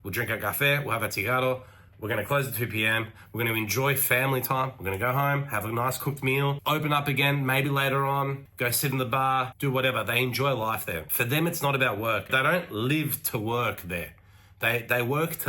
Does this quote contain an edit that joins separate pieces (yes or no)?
yes